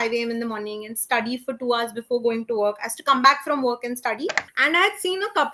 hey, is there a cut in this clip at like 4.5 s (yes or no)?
yes